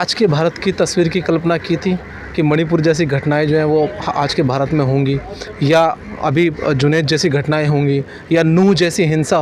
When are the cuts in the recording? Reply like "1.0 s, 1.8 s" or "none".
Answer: none